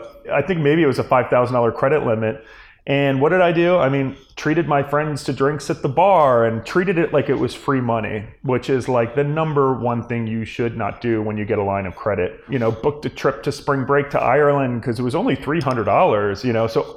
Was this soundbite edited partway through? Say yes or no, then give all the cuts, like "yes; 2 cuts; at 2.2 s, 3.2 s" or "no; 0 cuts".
yes; 1 cut; at 12.4 s